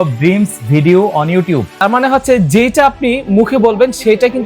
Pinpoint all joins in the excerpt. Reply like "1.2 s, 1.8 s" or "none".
1.8 s